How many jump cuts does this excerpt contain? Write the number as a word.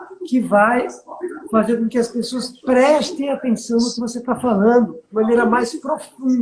one